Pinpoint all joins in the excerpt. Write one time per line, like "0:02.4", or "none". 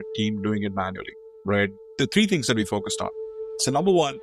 0:01.9

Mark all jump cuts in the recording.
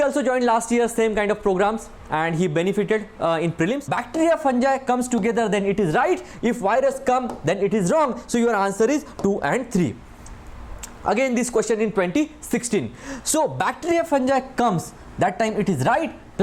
0:03.9

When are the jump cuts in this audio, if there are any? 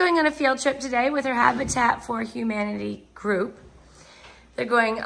none

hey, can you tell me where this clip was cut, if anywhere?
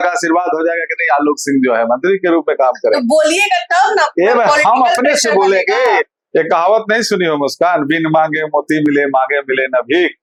none

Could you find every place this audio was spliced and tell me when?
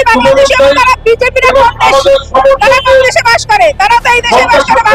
none

